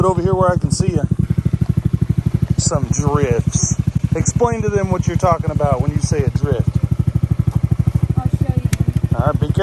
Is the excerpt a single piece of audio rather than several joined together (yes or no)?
no